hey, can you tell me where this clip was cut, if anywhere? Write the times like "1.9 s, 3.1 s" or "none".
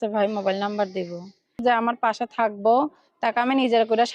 1.6 s